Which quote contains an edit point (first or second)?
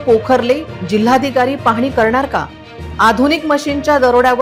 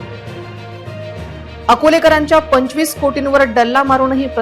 second